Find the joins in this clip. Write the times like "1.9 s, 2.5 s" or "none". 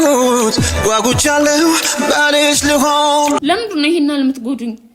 3.4 s